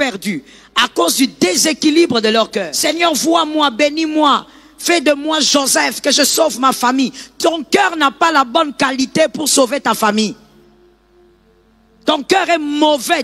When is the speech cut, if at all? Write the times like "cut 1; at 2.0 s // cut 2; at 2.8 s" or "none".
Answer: cut 1; at 2.7 s